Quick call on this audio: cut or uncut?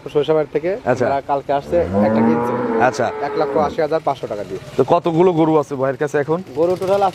uncut